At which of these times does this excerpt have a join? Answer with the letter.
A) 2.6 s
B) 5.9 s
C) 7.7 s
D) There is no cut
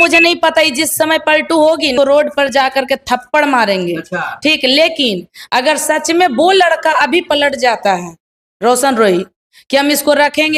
D